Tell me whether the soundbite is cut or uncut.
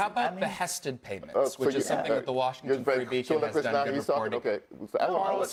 uncut